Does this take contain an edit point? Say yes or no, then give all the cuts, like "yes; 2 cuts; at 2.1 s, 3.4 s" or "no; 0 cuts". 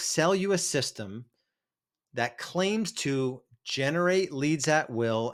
no; 0 cuts